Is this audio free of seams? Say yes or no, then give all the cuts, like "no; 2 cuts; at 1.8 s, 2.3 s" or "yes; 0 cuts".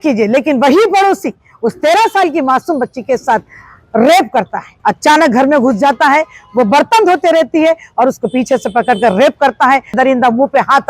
no; 2 cuts; at 4.6 s, 10.0 s